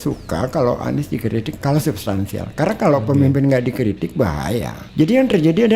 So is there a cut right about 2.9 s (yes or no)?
no